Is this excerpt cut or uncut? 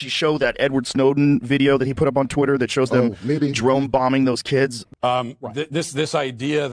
cut